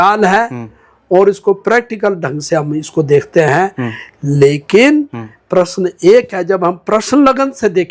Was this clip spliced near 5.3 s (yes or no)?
no